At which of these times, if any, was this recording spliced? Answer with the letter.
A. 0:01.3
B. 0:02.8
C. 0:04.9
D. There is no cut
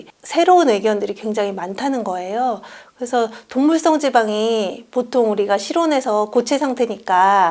D